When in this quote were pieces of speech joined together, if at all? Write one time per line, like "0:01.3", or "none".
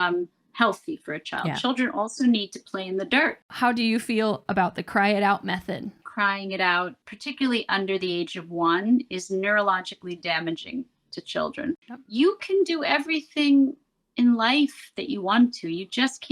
0:03.4
0:06.1
0:07.1
0:11.9